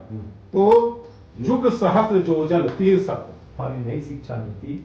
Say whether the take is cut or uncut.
cut